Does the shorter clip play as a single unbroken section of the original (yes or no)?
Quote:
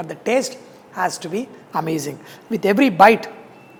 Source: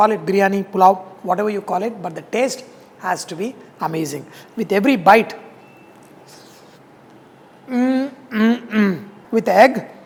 yes